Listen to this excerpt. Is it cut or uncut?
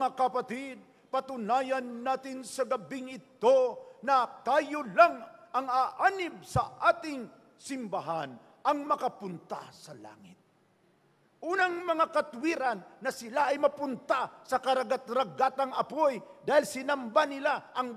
uncut